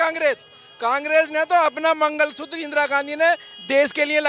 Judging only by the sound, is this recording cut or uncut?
uncut